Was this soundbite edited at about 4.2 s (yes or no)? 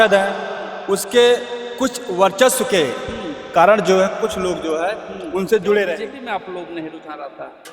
no